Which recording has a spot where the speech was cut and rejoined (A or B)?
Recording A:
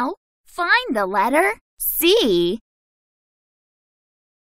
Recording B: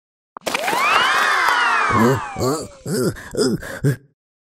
A